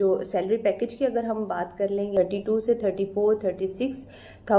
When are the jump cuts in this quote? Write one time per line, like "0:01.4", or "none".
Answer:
0:02.1